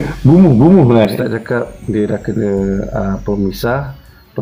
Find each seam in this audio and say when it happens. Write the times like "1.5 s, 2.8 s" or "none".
1.1 s